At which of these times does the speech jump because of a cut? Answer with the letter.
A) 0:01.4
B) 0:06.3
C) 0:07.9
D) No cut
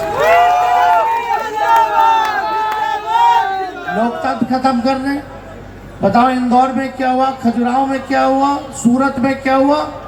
D